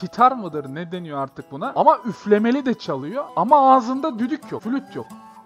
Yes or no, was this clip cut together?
yes